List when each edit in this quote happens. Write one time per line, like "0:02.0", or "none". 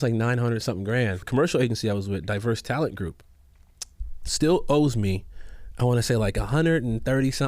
0:01.2